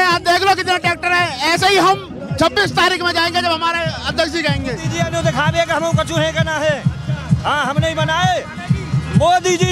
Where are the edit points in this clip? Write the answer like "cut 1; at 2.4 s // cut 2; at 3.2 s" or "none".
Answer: cut 1; at 4.9 s